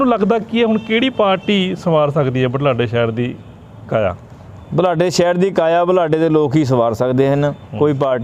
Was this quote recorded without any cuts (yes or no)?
yes